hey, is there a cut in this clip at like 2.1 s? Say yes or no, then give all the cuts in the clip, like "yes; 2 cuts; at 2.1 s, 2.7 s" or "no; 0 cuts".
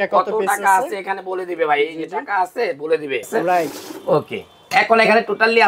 no; 1 cut; at 3.7 s